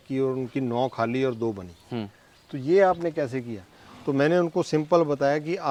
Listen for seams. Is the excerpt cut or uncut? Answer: uncut